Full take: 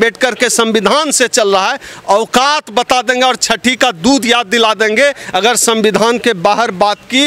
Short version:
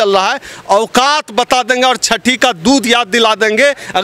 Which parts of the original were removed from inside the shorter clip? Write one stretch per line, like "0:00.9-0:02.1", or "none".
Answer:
none